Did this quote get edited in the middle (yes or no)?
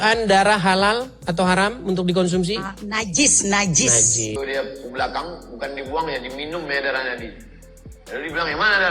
yes